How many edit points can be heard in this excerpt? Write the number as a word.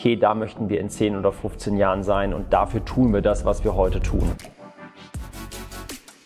one